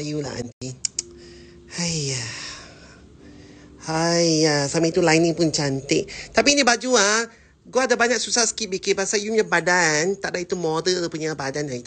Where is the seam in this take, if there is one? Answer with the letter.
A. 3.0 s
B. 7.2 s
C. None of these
C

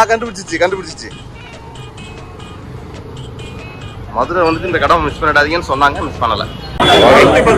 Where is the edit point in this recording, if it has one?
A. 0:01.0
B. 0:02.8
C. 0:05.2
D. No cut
D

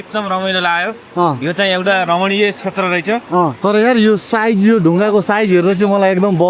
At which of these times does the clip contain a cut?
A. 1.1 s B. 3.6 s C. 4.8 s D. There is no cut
B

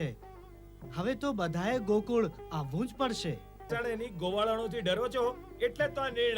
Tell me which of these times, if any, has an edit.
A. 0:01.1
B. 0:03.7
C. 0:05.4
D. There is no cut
B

